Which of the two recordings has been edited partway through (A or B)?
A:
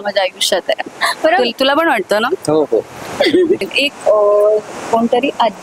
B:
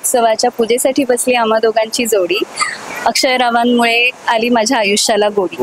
A